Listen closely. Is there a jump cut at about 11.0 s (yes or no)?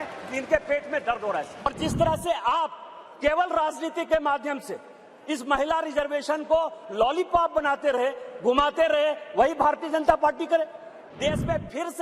yes